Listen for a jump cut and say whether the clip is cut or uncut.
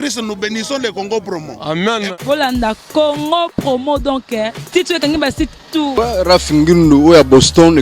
cut